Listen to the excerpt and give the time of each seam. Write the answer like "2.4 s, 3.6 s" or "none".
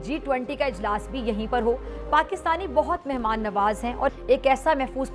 4.2 s